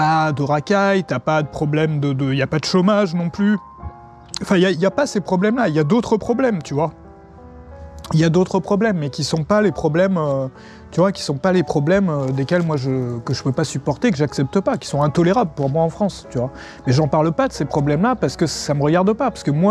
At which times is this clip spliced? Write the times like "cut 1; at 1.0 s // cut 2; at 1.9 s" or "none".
none